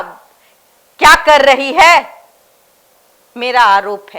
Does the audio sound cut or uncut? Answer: uncut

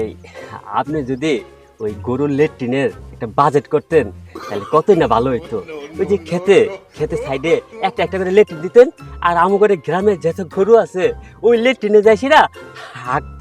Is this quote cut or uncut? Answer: uncut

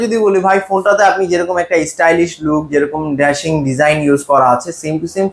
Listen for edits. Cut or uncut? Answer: uncut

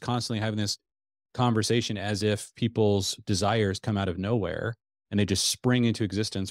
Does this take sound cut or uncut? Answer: uncut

